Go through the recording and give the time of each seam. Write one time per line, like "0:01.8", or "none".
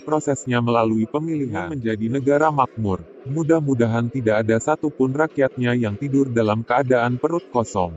0:01.7